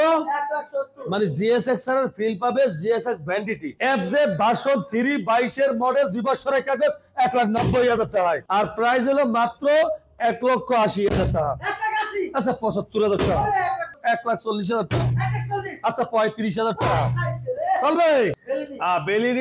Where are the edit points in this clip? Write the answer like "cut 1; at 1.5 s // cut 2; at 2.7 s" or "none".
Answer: cut 1; at 3.7 s // cut 2; at 8.4 s // cut 3; at 14.0 s // cut 4; at 18.4 s

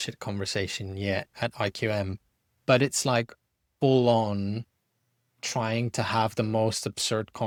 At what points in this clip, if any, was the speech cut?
none

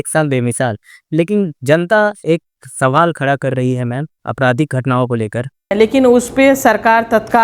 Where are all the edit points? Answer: cut 1; at 5.7 s

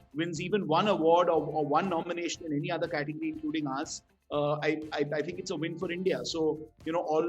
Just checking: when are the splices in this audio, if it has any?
none

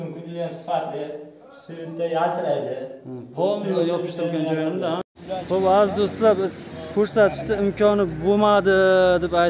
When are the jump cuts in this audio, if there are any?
cut 1; at 5.1 s

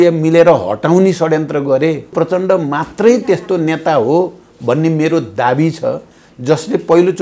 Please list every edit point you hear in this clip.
cut 1; at 2.1 s

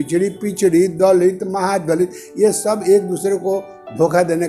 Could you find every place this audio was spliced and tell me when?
none

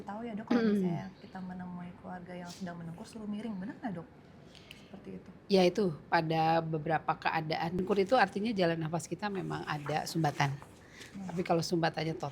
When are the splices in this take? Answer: cut 1; at 7.8 s

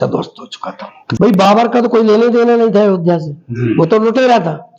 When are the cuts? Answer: cut 1; at 1.0 s

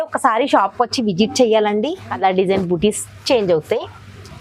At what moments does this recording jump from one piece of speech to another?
cut 1; at 2.1 s

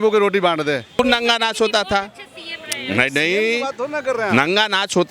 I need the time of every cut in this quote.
cut 1; at 1.0 s

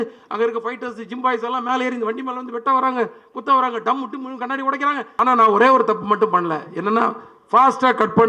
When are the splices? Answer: cut 1; at 5.1 s

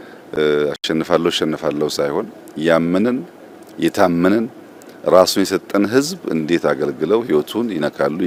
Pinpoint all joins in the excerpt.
none

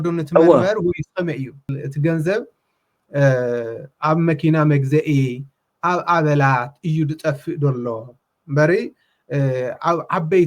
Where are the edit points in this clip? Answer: cut 1; at 1.8 s

